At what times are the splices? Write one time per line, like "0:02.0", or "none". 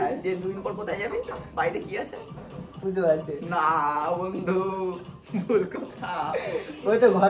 none